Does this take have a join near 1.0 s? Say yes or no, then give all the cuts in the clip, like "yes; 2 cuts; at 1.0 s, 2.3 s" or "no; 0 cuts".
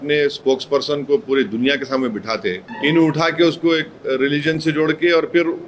no; 1 cut; at 2.7 s